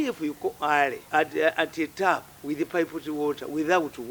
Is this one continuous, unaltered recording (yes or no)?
no